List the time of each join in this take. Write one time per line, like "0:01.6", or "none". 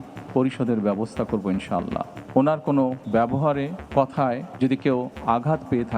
0:02.1
0:03.4
0:04.5